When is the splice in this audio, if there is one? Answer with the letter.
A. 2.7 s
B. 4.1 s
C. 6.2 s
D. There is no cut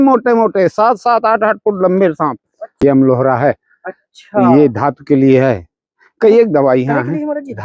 A